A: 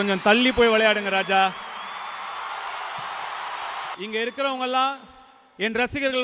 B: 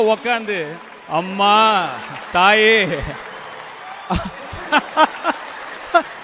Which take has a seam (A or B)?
A